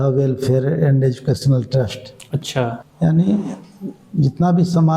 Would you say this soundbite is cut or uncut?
cut